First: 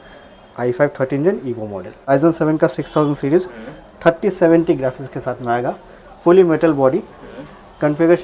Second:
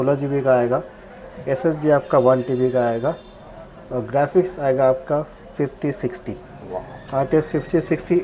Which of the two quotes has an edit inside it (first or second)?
first